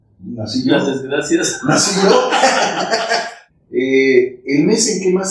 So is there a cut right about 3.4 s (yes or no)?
yes